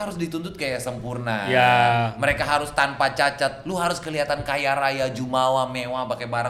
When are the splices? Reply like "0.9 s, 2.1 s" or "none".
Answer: none